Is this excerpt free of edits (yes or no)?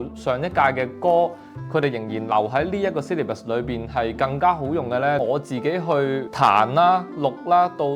no